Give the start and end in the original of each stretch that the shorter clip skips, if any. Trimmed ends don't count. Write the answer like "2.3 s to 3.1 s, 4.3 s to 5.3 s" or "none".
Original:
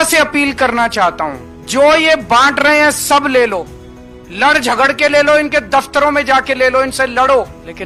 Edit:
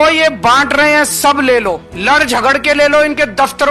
3.8 s to 4.2 s